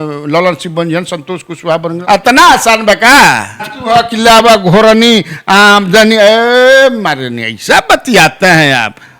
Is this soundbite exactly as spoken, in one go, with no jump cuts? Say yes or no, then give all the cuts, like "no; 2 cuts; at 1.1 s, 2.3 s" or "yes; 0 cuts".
no; 2 cuts; at 2.0 s, 3.7 s